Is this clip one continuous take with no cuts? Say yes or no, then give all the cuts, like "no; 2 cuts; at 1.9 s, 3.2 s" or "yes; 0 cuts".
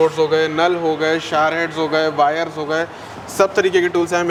yes; 0 cuts